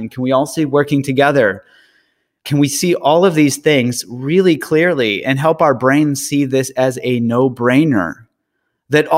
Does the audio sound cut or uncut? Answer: cut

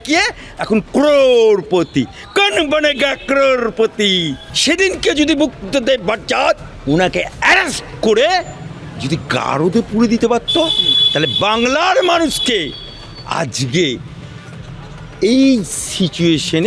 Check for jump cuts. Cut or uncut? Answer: cut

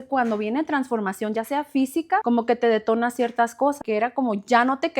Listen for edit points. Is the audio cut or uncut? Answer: cut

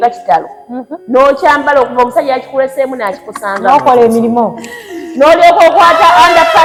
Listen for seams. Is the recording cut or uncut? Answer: uncut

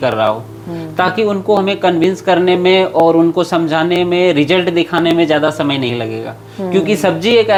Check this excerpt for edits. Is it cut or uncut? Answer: uncut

